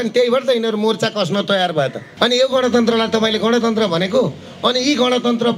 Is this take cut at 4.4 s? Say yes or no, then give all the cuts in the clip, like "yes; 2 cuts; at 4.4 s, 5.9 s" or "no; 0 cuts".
no; 1 cut; at 2.0 s